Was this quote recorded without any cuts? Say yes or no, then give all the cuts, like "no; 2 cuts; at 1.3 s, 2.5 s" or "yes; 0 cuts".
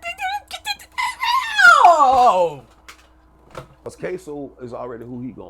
no; 1 cut; at 3.9 s